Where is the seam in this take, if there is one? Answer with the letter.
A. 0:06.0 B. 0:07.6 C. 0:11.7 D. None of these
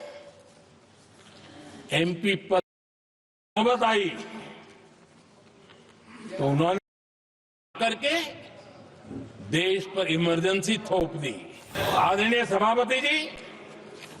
C